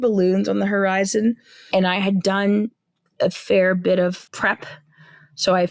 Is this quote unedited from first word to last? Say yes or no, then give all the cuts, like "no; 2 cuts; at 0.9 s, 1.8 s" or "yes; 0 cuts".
no; 1 cut; at 1.6 s